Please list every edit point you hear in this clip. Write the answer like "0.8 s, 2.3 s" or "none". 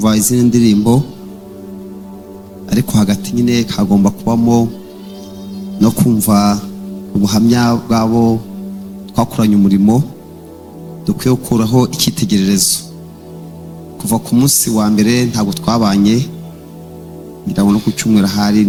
none